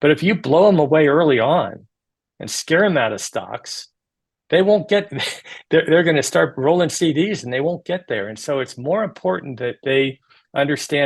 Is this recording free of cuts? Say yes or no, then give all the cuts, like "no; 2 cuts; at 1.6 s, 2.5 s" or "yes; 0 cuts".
yes; 0 cuts